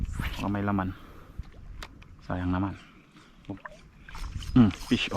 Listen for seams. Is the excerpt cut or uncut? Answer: cut